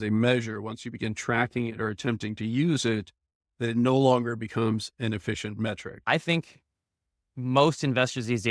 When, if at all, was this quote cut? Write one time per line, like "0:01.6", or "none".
0:06.0